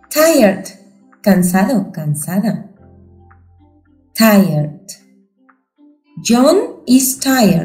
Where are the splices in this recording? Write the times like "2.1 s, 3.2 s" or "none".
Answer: none